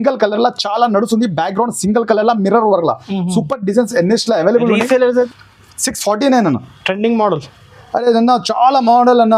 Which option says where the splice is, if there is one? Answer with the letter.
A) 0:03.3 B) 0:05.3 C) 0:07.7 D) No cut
B